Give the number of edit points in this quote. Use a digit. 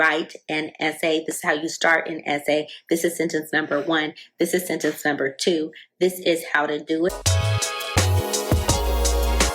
1